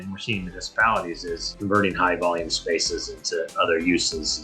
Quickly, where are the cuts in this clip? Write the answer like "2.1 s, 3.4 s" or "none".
1.5 s

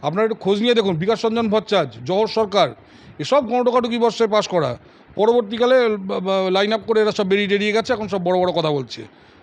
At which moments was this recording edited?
none

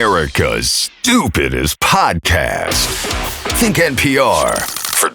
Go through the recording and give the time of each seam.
none

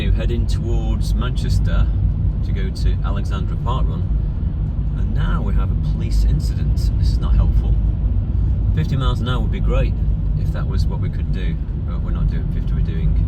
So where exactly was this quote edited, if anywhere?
none

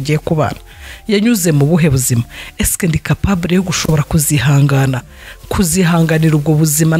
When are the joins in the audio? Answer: none

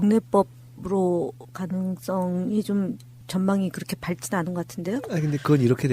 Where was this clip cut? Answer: 2.7 s

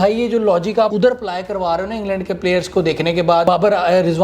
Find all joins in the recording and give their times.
0.9 s, 3.4 s

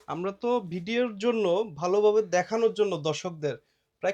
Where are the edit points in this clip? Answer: none

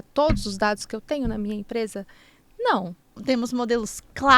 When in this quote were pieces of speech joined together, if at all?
3.2 s

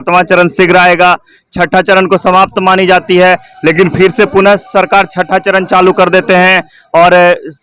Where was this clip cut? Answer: none

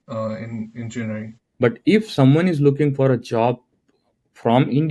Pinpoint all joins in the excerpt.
1.4 s

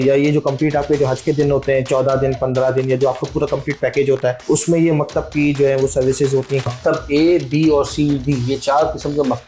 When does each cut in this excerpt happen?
4.4 s, 6.7 s

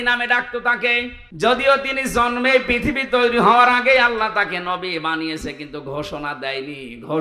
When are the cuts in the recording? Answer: 1.2 s

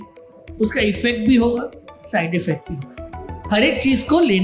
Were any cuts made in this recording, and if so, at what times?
none

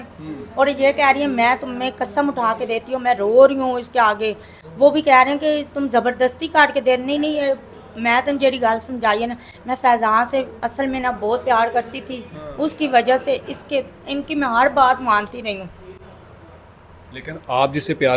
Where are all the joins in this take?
none

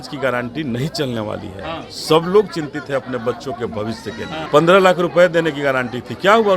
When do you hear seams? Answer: 4.5 s

